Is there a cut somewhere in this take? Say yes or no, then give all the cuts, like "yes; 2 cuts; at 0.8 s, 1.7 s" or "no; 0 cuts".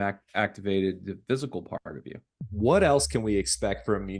yes; 1 cut; at 2.3 s